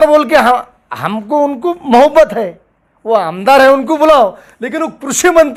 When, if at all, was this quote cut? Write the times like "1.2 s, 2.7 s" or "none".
none